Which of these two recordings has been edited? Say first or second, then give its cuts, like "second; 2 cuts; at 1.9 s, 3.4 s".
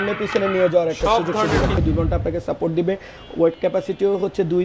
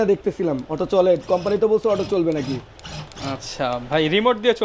first; 1 cut; at 1.8 s